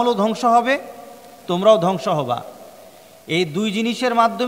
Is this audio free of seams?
yes; 0 cuts

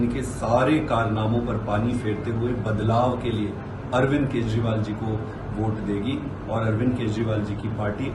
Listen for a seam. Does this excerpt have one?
no; 0 cuts

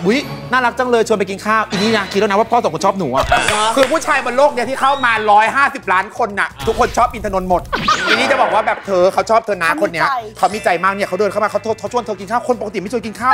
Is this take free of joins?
yes; 0 cuts

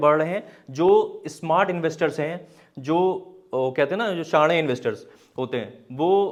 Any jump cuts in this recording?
no; 0 cuts

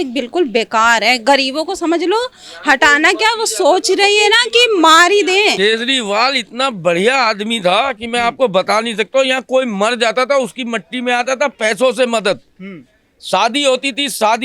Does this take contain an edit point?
yes; 1 cut; at 5.6 s

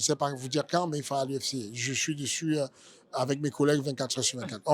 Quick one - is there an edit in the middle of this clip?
no; 0 cuts

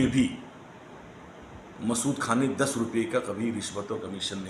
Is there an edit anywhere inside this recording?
no; 0 cuts

